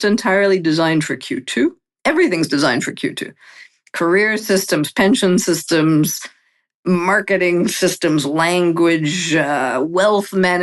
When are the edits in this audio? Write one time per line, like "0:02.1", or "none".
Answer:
none